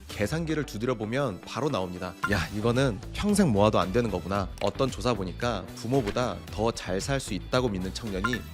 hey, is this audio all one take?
no; 1 cut; at 4.5 s

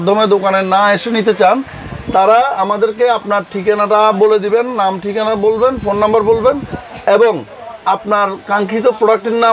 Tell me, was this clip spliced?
no; 0 cuts

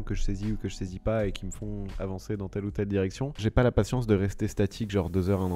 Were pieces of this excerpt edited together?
yes; 1 cut; at 3.3 s

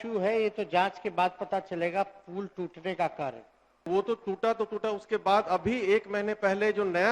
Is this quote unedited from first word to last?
no; 1 cut; at 3.9 s

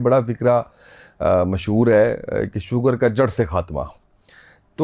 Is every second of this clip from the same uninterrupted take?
yes; 0 cuts

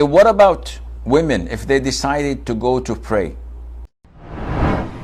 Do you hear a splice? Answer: yes; 1 cut; at 3.9 s

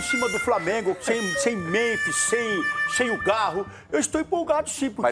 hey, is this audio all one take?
yes; 0 cuts

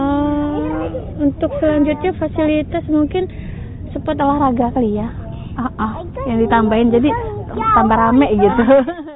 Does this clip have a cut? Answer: no; 0 cuts

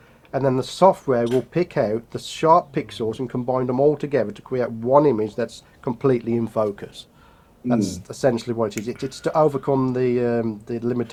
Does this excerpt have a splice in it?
no; 0 cuts

